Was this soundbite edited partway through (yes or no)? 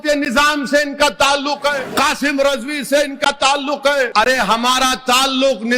yes